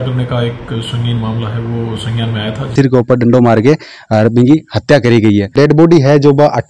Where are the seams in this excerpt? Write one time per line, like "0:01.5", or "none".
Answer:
0:02.7
0:05.5